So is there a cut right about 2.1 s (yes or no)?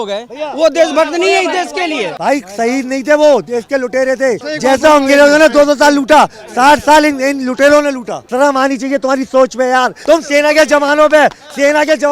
yes